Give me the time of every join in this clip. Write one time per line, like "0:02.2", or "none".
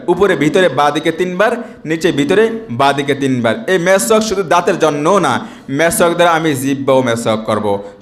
none

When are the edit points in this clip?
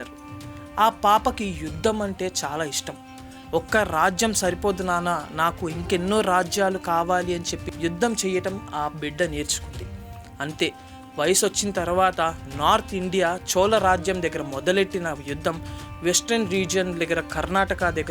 none

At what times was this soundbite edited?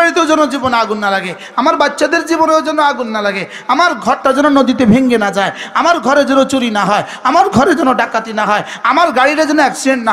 none

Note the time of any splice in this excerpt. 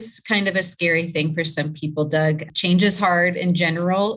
0:02.5

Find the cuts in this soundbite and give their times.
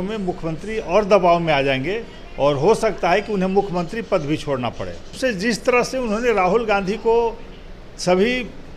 0:05.1

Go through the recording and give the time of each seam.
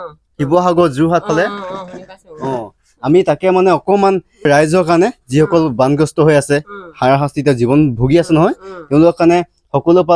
none

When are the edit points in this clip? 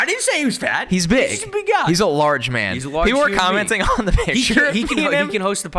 none

